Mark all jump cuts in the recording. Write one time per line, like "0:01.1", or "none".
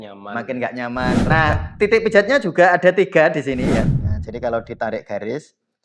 0:01.2
0:03.9